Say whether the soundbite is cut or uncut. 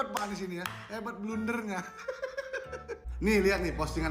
uncut